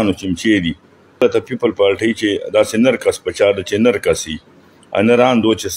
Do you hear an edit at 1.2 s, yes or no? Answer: yes